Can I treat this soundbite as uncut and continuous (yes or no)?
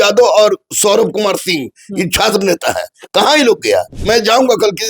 no